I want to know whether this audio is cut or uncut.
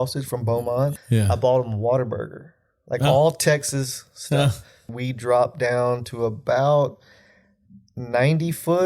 cut